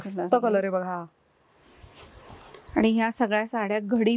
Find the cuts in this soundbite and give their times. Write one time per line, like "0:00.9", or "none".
none